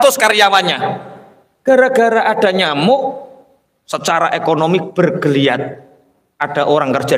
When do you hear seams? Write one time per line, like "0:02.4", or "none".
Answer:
none

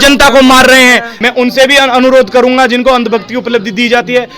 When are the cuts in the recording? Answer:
0:01.1

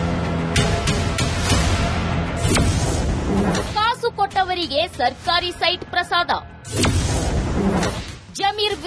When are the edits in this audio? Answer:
0:00.9

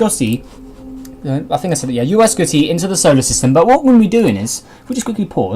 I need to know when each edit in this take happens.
0:04.5

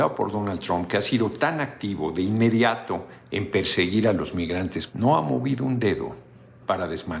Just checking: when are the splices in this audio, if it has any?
0:04.8

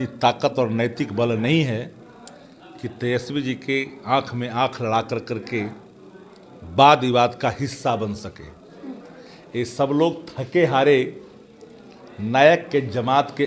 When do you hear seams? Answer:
none

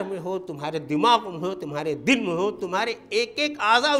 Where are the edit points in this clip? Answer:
none

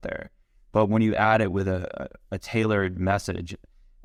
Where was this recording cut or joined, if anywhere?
none

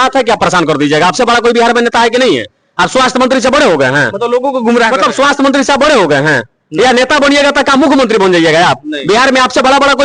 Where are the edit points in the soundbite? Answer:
none

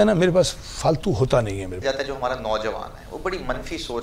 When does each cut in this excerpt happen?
0:01.8

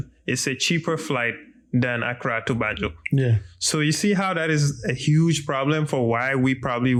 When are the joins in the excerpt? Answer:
none

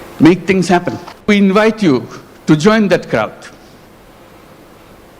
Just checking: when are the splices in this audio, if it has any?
0:01.3

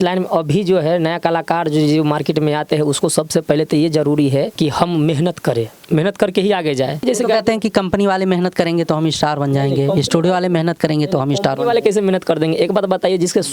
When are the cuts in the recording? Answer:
0:07.0

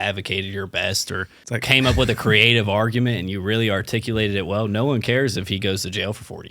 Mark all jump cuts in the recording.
0:01.3

